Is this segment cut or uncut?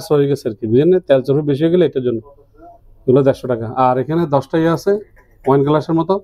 uncut